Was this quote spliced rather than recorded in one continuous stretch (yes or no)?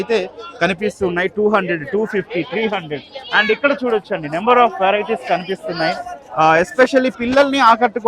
no